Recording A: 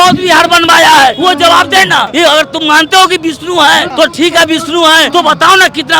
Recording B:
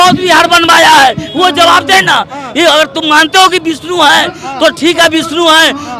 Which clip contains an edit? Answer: A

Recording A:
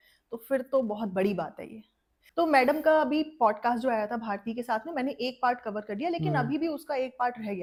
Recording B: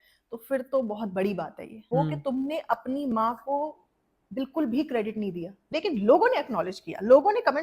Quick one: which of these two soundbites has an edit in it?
B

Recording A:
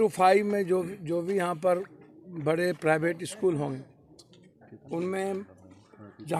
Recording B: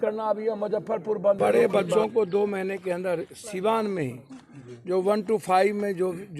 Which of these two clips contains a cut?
B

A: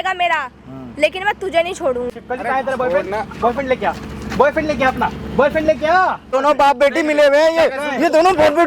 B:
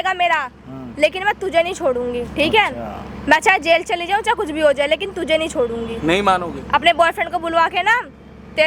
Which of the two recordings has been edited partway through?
A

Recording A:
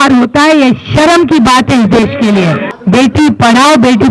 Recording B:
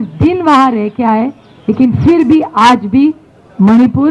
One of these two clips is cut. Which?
A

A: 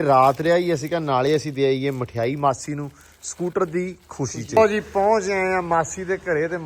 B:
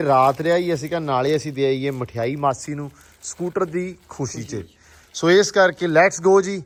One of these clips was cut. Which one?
A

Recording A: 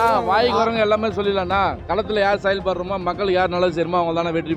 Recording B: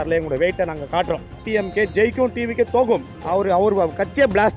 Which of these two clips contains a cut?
B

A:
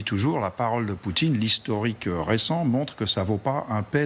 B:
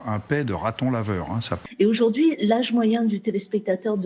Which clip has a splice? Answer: B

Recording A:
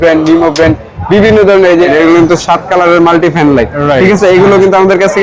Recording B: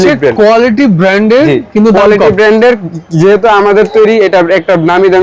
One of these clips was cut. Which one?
A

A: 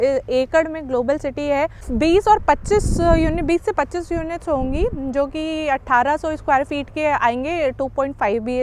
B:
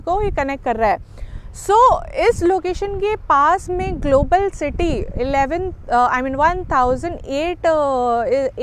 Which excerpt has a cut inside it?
A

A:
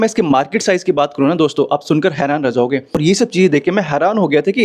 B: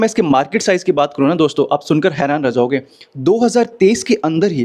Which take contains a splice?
A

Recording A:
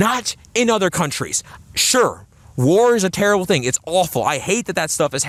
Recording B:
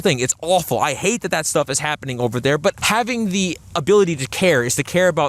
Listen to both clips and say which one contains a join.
B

